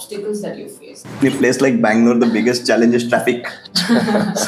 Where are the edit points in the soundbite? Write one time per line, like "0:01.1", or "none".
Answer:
0:01.2

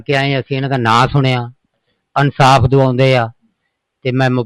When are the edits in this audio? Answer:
none

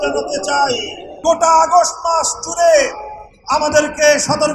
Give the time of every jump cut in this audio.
0:01.2

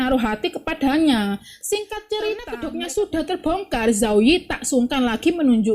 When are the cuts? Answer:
0:02.5

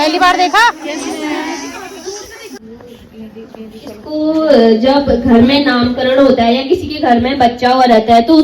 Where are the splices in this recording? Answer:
0:02.6

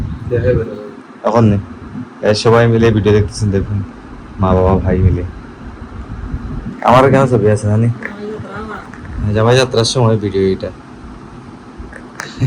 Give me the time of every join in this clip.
none

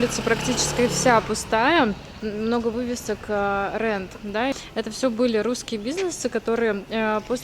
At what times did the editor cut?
0:02.2
0:04.5

